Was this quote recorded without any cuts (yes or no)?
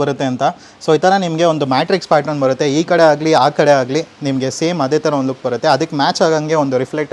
yes